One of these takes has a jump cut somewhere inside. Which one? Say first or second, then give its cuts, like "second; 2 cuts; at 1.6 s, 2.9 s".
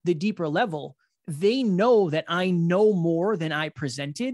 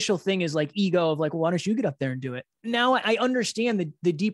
second; 1 cut; at 2.4 s